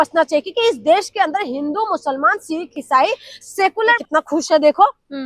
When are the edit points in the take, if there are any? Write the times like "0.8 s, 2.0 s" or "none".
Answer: 4.0 s